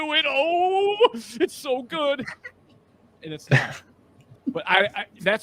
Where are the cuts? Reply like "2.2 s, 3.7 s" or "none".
4.3 s